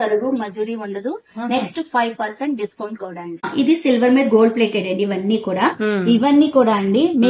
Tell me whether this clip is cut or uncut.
cut